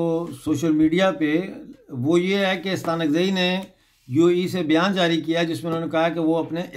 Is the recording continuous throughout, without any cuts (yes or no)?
yes